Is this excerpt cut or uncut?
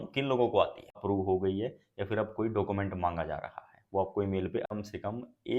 cut